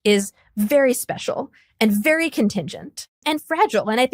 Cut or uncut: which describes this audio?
cut